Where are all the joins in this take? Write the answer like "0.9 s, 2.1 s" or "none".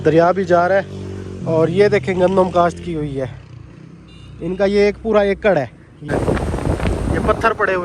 6.0 s